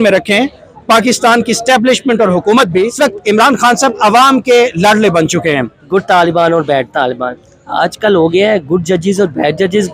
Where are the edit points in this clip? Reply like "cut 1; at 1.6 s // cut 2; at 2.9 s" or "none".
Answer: cut 1; at 2.9 s // cut 2; at 5.8 s